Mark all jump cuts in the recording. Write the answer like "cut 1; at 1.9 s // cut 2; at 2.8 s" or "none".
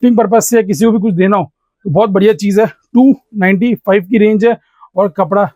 none